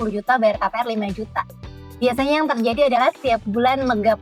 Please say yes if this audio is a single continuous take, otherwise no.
yes